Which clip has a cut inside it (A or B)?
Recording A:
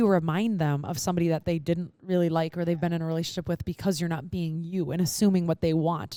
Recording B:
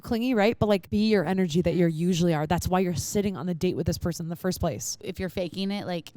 B